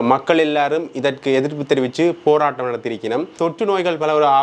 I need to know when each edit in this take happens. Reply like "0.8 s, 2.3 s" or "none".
3.3 s